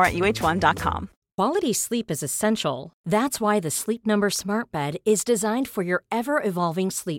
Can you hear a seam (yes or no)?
yes